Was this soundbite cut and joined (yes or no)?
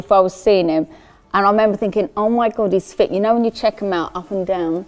no